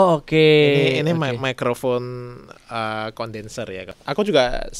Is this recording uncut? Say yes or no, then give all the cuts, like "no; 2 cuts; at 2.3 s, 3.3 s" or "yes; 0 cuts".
no; 1 cut; at 3.9 s